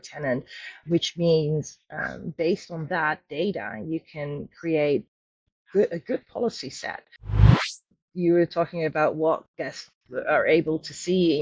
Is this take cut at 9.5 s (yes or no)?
no